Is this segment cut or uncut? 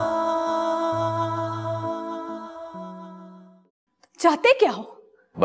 cut